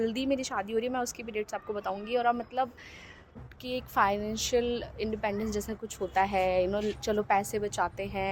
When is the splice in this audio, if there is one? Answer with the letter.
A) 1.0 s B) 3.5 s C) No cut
B